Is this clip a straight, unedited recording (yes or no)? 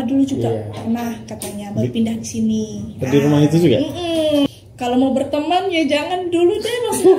no